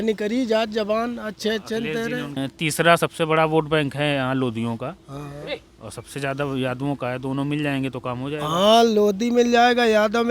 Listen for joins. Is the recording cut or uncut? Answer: cut